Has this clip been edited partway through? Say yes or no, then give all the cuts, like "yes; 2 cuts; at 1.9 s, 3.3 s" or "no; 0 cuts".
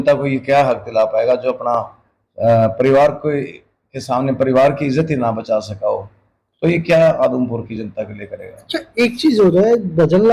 no; 0 cuts